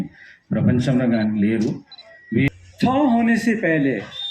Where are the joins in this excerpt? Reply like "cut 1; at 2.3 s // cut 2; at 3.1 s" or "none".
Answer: cut 1; at 2.5 s